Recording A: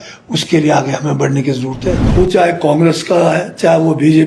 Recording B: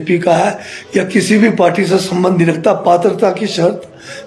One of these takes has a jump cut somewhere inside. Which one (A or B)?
A